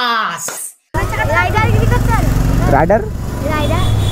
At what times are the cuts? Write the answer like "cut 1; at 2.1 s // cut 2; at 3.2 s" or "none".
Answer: cut 1; at 0.9 s